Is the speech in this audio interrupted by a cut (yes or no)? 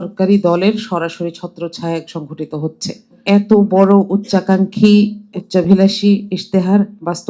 yes